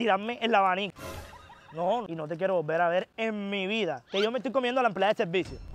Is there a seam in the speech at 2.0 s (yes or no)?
yes